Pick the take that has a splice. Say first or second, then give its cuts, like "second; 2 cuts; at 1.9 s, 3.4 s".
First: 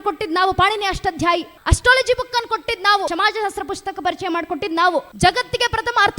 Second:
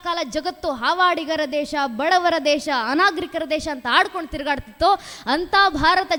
first; 3 cuts; at 1.6 s, 3.1 s, 5.1 s